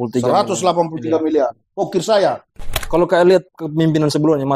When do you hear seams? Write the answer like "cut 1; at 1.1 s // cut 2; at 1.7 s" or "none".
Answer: cut 1; at 2.8 s